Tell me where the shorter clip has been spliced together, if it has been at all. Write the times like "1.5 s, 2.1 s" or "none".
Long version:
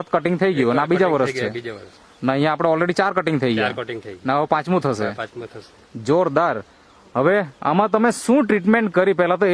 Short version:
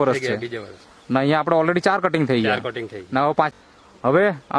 3.5 s